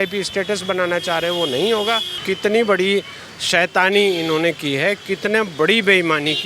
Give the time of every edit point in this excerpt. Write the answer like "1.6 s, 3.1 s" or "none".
2.2 s